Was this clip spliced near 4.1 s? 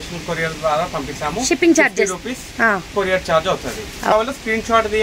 yes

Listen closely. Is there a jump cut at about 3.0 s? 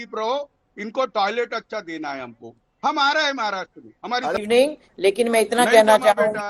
no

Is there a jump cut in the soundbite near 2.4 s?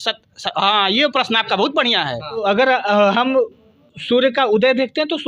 yes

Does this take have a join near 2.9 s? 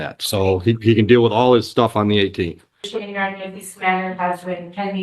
yes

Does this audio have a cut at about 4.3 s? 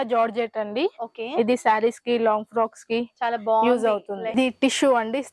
yes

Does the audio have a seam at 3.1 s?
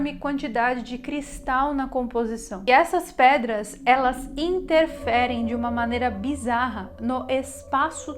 no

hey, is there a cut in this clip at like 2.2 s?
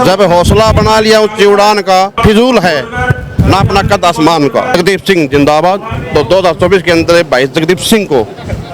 yes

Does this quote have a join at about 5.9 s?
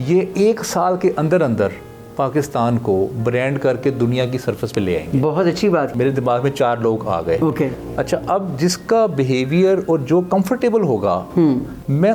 yes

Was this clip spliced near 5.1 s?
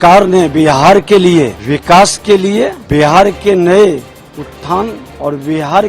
yes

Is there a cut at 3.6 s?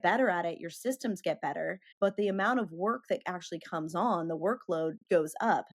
no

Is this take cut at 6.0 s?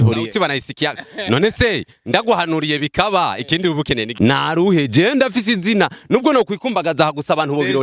no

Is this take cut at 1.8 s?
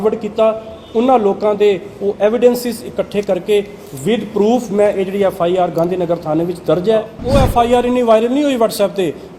no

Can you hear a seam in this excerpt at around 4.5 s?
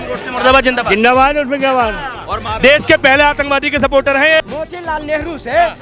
yes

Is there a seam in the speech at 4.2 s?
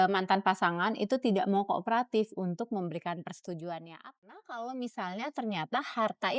yes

